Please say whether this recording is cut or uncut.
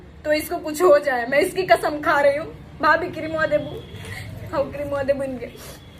uncut